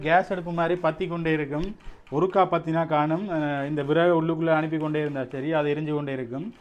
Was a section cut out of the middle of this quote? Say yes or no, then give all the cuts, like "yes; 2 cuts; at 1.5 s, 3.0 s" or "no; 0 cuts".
no; 0 cuts